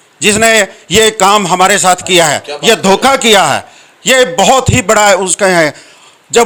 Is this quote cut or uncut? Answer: uncut